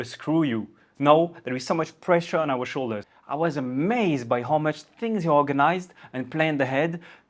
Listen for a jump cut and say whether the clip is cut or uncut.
cut